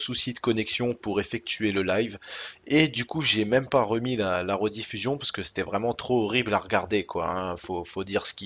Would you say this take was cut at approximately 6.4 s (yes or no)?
no